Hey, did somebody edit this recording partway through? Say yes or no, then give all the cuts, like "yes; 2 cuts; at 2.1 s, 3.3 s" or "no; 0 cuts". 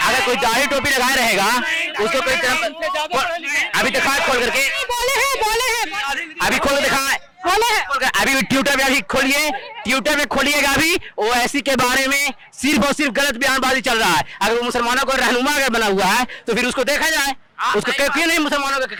no; 0 cuts